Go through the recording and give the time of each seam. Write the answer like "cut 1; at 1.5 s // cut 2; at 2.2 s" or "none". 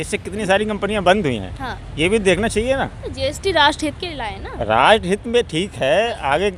none